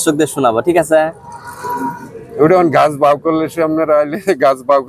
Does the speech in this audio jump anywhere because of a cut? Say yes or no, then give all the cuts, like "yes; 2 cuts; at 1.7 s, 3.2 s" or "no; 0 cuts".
no; 0 cuts